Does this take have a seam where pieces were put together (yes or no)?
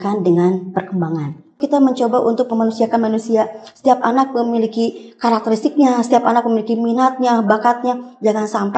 yes